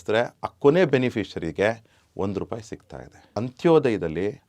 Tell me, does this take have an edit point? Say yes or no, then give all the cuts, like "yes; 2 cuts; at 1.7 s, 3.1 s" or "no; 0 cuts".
yes; 1 cut; at 3.4 s